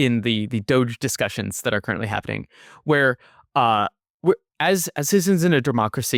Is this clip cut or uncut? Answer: uncut